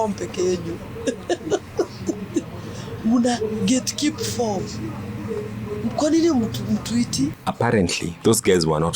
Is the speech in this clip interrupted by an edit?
yes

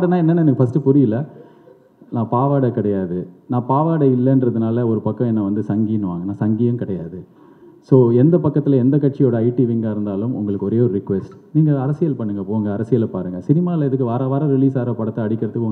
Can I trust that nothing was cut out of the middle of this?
yes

